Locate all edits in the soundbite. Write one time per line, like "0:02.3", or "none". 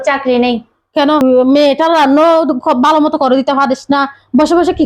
0:01.2